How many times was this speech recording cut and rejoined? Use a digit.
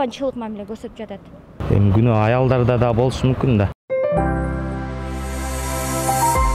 1